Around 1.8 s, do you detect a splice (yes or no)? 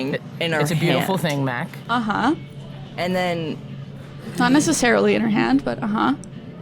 yes